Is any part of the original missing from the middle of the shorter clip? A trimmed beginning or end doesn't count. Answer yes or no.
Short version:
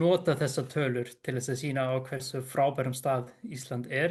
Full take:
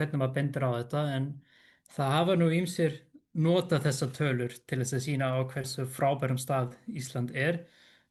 no